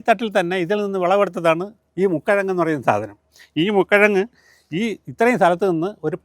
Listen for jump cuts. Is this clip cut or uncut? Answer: uncut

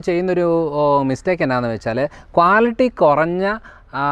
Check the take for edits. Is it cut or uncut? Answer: uncut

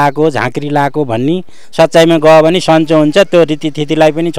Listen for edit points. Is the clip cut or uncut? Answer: cut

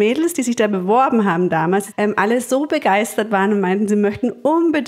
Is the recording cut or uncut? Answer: cut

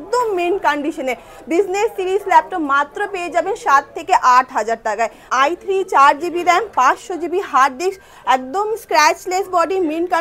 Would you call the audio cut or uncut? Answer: cut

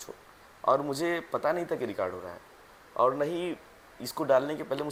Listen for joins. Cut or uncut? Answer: uncut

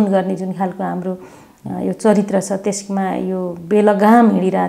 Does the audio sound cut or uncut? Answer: uncut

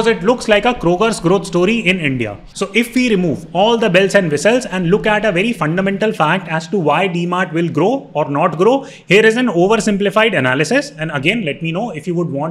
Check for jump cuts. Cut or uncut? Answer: uncut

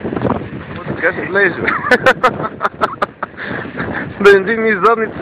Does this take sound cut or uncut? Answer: cut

